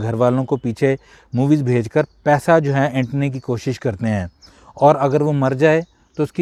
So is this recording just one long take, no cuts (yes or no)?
yes